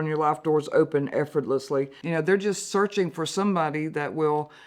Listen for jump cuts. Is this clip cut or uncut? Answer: cut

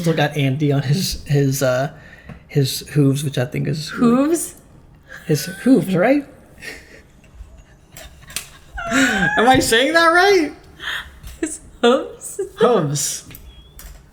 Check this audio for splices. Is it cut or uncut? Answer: uncut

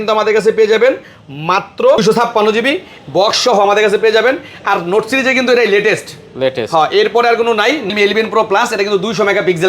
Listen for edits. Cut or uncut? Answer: cut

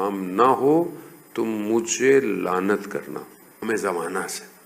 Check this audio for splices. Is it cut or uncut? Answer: cut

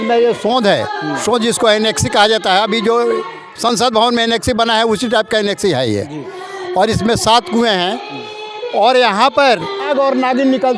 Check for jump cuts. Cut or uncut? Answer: cut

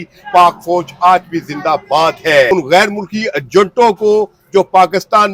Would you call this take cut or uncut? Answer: uncut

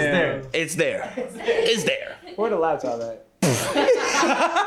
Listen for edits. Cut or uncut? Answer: uncut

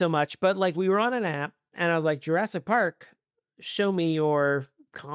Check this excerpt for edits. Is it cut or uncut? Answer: uncut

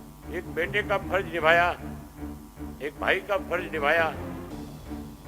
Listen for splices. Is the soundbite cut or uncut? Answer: cut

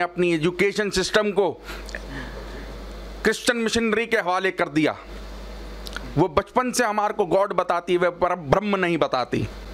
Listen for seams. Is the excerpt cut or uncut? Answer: uncut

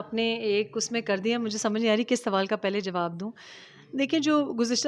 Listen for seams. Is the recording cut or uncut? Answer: uncut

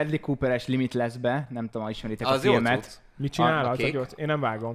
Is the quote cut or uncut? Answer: uncut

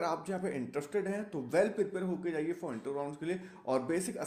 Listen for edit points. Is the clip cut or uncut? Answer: uncut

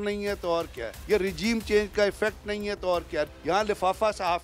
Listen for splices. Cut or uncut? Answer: cut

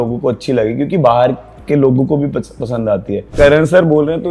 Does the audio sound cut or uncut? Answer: cut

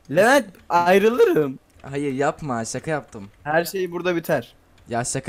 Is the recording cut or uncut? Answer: uncut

